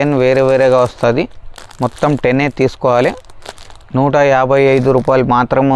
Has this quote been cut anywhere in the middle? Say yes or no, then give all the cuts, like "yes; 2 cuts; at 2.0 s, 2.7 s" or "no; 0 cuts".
no; 0 cuts